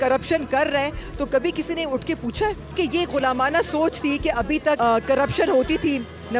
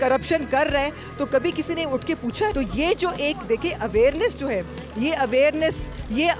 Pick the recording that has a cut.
first; 1 cut; at 2.7 s

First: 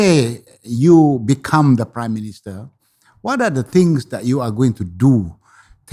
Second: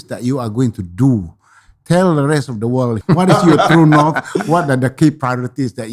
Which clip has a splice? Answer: second; 1 cut; at 3.0 s

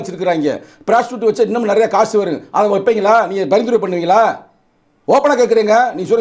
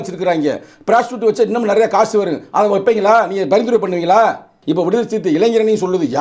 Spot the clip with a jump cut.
second; 1 cut; at 4.5 s

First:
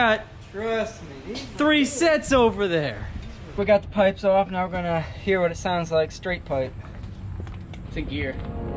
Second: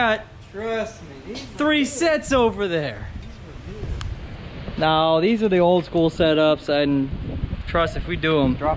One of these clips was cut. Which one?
first; 2 cuts; at 3.6 s, 7.8 s

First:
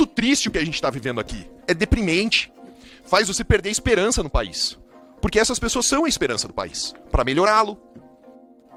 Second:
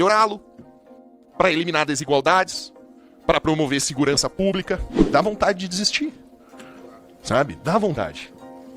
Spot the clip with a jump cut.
second; 1 cut; at 4.9 s

